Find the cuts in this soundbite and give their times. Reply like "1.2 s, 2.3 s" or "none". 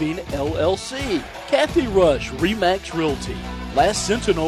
1.3 s